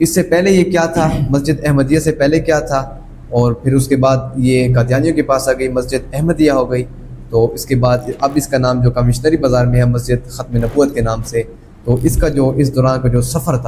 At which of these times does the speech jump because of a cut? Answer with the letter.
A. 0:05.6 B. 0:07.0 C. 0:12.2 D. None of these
D